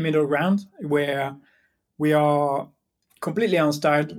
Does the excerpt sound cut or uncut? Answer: uncut